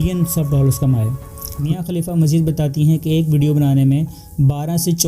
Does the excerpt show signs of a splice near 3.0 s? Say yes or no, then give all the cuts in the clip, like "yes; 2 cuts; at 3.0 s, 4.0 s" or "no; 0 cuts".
no; 1 cut; at 1.5 s